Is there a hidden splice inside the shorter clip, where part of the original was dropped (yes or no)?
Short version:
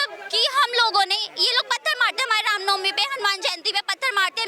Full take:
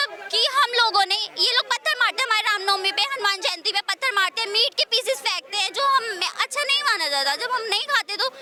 no